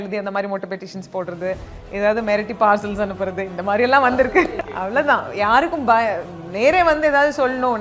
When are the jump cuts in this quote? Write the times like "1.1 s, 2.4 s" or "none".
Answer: 4.6 s